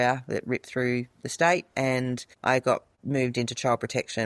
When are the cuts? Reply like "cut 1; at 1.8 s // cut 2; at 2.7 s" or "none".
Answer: cut 1; at 2.3 s // cut 2; at 2.9 s